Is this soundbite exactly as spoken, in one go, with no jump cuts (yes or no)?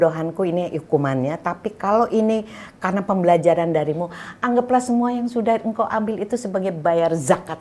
yes